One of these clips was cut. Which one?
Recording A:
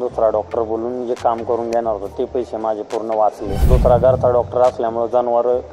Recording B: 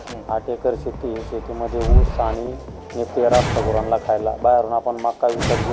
A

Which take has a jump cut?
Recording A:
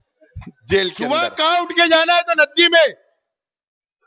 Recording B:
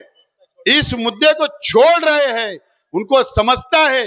A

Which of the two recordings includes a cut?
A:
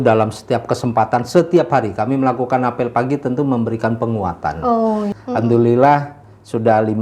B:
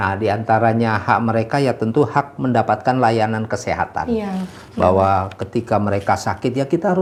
A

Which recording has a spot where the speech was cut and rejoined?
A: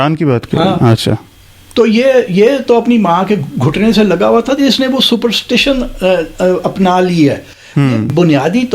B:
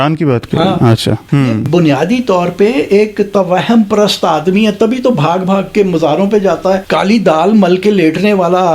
B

